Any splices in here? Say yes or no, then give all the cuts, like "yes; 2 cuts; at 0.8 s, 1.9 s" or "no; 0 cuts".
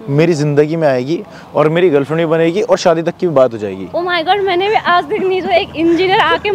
no; 0 cuts